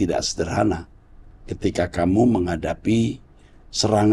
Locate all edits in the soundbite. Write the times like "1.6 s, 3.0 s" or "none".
none